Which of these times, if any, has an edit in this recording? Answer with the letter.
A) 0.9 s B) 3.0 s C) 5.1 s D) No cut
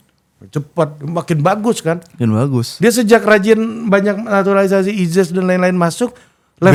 D